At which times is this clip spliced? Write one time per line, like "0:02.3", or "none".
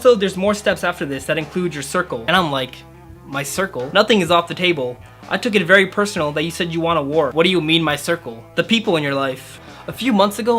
0:07.3
0:09.6